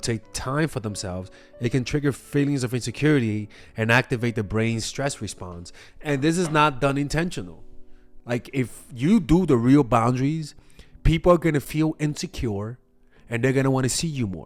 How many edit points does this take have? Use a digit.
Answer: 0